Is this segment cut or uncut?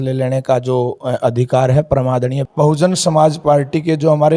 cut